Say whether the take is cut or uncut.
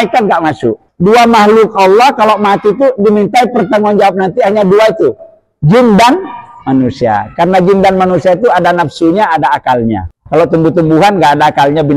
cut